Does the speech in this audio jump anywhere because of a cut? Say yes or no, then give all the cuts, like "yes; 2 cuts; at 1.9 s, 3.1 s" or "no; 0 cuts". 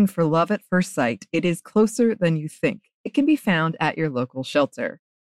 no; 0 cuts